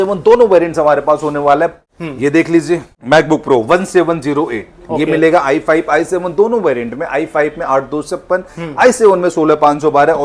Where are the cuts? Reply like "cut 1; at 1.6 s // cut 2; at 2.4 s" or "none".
cut 1; at 1.8 s // cut 2; at 2.9 s

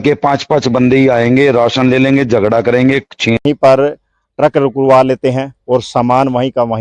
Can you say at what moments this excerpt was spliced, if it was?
cut 1; at 3.4 s

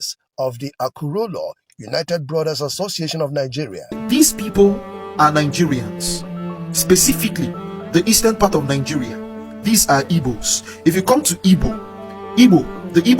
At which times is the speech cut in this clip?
cut 1; at 3.9 s

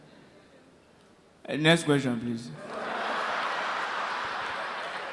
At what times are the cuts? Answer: none

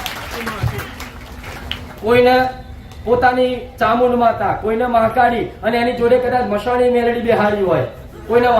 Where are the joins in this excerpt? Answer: cut 1; at 1.7 s

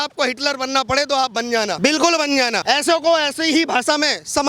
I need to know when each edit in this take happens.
cut 1; at 1.7 s // cut 2; at 2.6 s

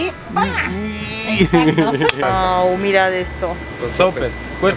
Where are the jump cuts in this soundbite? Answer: cut 1; at 2.2 s

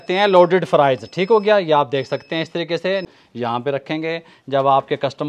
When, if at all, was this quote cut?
cut 1; at 3.1 s

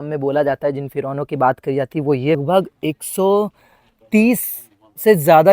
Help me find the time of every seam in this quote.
cut 1; at 2.4 s

